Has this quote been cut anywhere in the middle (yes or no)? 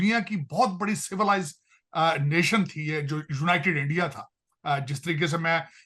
no